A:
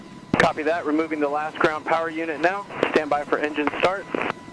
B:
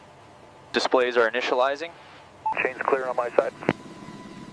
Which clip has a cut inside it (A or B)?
B